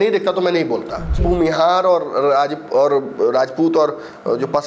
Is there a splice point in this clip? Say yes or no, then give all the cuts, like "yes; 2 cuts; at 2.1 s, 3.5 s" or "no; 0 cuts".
yes; 1 cut; at 1.2 s